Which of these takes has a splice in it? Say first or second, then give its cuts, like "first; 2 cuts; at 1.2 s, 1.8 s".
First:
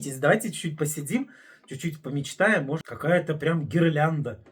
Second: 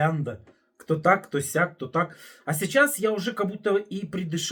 first; 1 cut; at 2.8 s